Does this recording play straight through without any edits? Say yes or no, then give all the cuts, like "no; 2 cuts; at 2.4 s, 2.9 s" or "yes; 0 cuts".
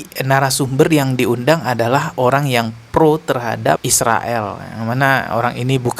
yes; 0 cuts